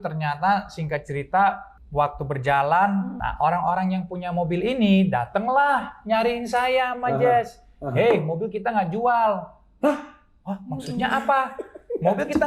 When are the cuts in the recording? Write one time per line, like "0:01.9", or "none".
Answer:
0:01.7
0:03.2